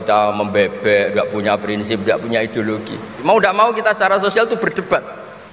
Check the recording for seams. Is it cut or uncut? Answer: cut